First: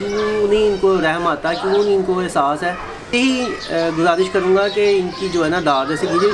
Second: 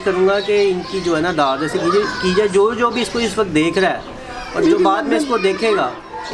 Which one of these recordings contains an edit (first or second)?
first